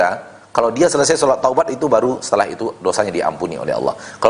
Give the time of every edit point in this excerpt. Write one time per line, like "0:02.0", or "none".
none